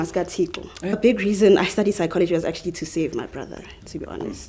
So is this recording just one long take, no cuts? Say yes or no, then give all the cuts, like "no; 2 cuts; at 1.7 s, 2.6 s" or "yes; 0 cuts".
no; 1 cut; at 0.9 s